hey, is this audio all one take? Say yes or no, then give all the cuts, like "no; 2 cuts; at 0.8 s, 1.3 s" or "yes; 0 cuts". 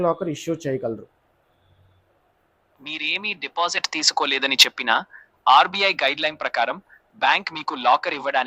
yes; 0 cuts